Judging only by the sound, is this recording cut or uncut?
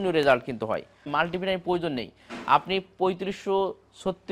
cut